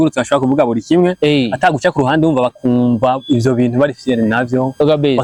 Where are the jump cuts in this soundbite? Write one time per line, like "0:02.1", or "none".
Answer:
none